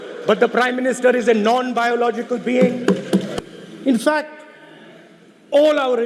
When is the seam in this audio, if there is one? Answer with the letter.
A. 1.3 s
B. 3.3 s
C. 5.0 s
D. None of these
B